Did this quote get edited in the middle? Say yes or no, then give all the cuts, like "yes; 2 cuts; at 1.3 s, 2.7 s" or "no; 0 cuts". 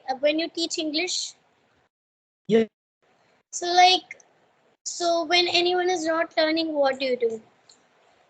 yes; 1 cut; at 2.8 s